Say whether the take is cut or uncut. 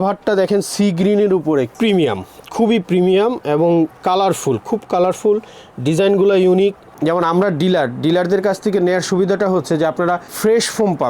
cut